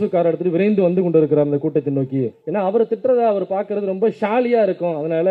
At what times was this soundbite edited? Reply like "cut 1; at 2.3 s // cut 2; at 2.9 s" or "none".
none